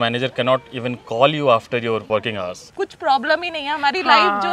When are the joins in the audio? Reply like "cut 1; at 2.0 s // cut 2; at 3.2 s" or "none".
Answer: cut 1; at 2.3 s